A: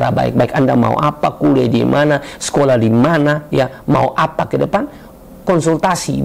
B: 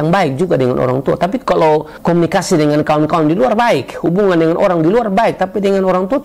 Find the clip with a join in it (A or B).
B